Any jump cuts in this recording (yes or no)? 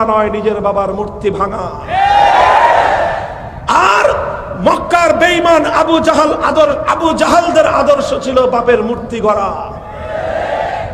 no